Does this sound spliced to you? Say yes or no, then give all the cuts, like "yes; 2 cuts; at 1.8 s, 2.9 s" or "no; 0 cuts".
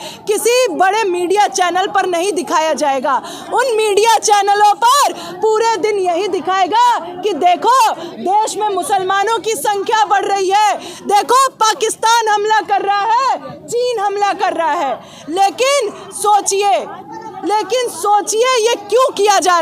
no; 0 cuts